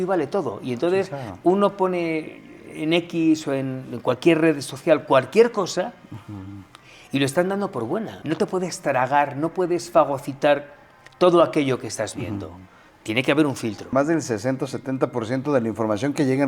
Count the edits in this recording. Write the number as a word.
two